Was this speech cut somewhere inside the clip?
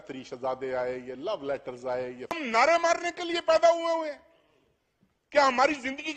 yes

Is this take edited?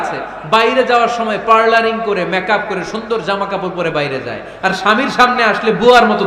no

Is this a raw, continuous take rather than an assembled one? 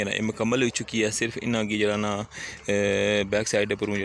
yes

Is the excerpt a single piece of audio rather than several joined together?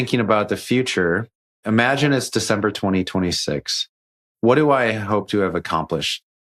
no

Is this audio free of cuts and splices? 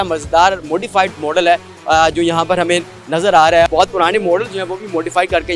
yes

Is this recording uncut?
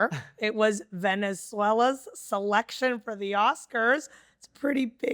yes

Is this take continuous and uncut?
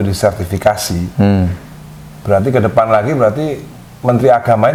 yes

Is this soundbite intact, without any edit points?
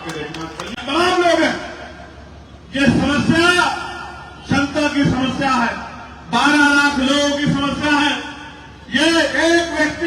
no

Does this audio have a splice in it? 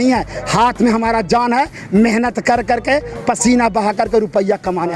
no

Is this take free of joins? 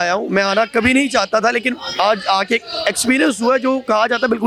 yes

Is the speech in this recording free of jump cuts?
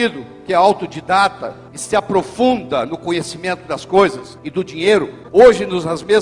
no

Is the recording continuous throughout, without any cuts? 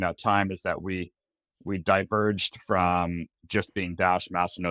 yes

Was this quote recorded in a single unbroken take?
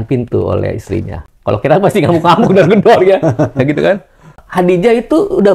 no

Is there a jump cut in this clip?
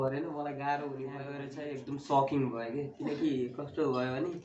yes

